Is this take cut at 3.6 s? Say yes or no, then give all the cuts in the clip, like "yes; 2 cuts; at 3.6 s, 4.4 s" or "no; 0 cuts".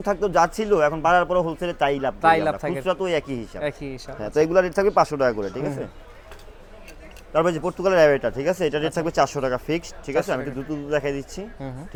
no; 0 cuts